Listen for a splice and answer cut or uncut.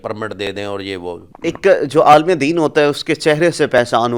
cut